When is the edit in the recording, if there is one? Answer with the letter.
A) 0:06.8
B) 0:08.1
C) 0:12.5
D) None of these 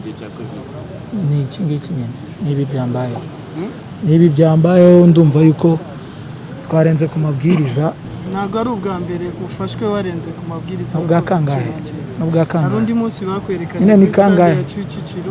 B